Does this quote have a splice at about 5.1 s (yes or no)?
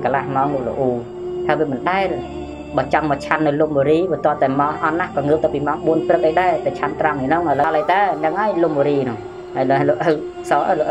no